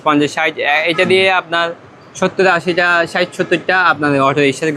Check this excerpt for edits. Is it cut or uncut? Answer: uncut